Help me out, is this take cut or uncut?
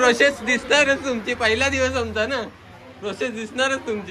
uncut